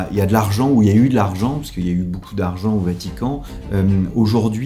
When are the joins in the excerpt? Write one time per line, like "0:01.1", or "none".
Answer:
0:03.5